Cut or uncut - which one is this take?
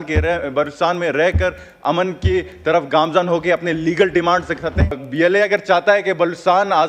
cut